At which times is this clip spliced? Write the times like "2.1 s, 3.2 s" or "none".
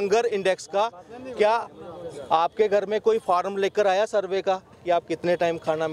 none